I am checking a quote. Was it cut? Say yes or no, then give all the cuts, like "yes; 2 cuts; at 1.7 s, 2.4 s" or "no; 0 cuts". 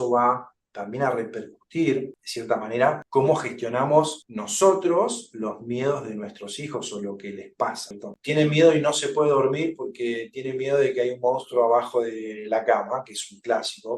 yes; 1 cut; at 8.1 s